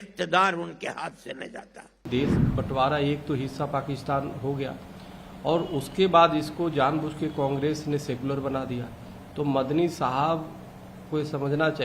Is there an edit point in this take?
yes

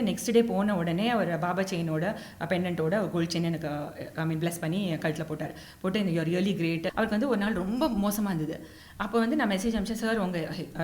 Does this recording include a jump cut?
yes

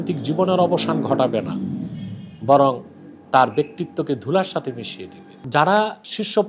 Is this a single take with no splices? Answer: no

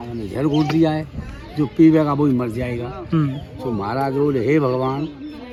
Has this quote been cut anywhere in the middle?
no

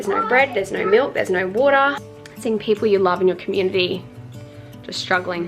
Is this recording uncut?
no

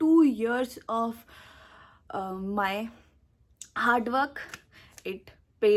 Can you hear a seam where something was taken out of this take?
no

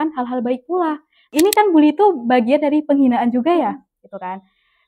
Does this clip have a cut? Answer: yes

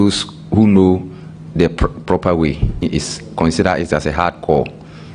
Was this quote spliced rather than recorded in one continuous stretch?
yes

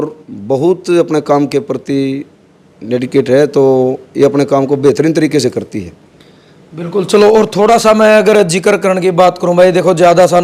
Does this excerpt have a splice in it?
no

